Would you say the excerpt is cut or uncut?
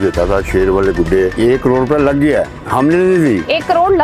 cut